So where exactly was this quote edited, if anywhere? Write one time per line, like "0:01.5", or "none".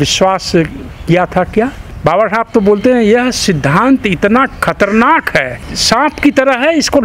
0:01.9
0:05.5